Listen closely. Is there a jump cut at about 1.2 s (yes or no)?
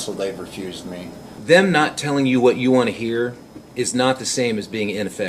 yes